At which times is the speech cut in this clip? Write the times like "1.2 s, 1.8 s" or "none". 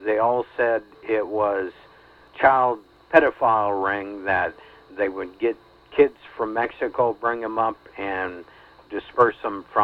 2.2 s, 2.9 s